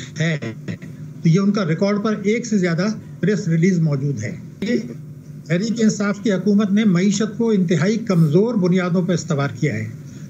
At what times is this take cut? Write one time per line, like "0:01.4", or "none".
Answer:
0:04.6